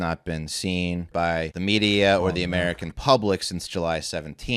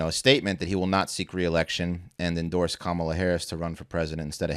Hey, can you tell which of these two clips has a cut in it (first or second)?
first